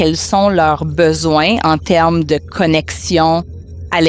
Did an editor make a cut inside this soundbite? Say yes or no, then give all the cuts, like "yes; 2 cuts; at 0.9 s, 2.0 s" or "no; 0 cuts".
no; 0 cuts